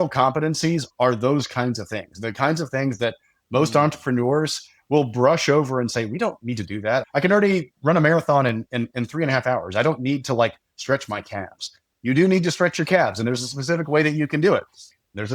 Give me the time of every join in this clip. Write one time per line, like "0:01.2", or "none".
0:07.0
0:07.7